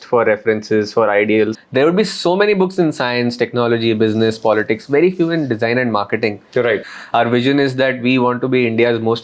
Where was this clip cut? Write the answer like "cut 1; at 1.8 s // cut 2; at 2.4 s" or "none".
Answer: cut 1; at 1.6 s // cut 2; at 6.9 s